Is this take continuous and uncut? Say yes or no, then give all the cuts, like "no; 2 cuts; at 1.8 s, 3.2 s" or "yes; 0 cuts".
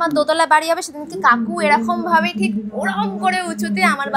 yes; 0 cuts